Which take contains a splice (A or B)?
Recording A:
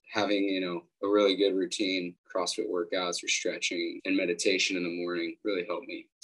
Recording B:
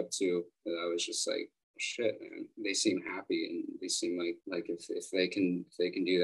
A